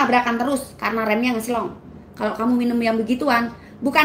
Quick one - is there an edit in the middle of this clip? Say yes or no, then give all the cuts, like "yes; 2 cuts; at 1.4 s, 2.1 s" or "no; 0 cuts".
no; 0 cuts